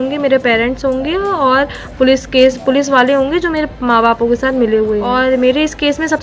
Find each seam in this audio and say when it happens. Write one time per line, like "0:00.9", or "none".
0:05.1